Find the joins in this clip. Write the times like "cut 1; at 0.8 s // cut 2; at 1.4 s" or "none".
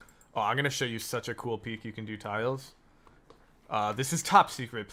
none